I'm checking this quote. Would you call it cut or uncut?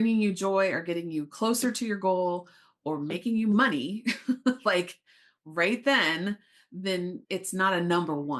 uncut